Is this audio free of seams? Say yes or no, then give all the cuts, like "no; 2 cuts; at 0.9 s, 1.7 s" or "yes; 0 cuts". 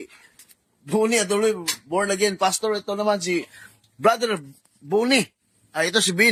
yes; 0 cuts